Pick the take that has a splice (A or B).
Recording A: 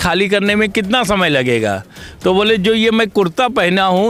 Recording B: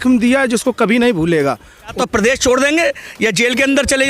B